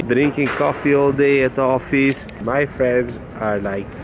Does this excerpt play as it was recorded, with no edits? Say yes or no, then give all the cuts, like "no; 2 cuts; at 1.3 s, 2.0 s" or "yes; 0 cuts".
no; 1 cut; at 2.4 s